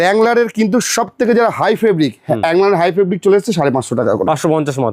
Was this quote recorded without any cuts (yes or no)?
yes